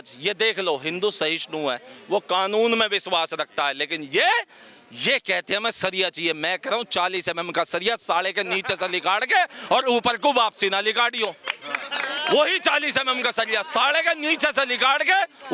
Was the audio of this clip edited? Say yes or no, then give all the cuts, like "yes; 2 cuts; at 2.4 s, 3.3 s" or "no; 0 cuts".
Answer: no; 0 cuts